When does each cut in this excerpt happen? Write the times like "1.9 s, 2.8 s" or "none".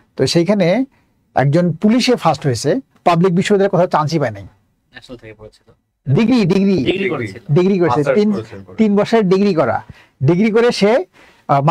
2.9 s